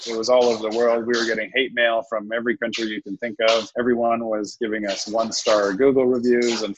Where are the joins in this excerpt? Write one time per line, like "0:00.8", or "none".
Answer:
0:03.7